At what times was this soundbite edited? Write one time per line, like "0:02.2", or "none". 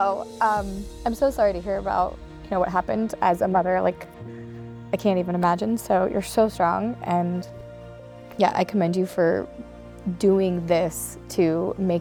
none